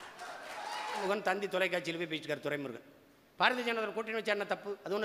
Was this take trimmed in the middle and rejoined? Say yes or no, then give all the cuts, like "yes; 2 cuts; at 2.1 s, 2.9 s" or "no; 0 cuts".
yes; 1 cut; at 1.0 s